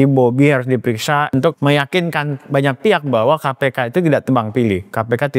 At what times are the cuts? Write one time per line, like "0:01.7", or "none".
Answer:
0:01.3